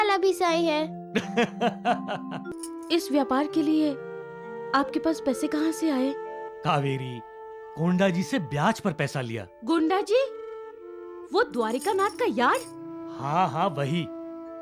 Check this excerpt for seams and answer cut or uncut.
cut